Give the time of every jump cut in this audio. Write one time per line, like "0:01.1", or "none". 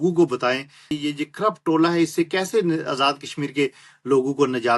0:00.9